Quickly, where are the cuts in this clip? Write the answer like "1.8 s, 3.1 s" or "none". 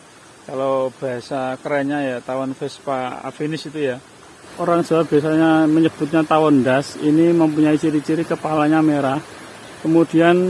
4.4 s